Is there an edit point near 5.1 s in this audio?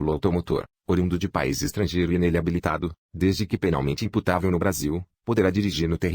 yes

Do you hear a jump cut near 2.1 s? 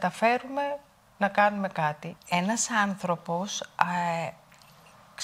yes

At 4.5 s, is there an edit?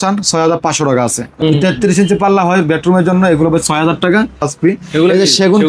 yes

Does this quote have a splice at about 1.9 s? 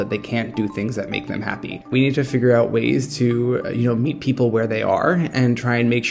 yes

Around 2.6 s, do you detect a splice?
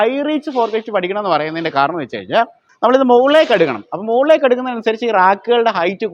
yes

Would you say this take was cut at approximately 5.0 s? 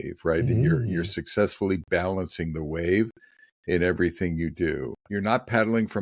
yes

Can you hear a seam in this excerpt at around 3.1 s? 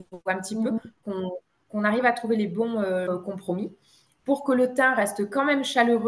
yes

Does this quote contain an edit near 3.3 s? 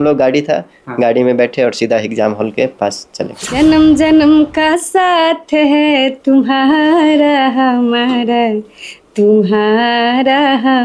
yes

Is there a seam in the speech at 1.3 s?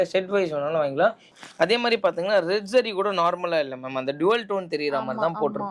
yes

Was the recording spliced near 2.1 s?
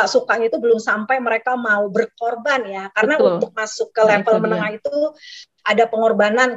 no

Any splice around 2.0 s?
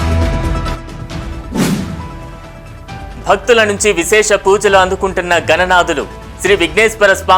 yes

